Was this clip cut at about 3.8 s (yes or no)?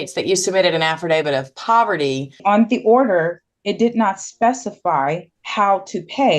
no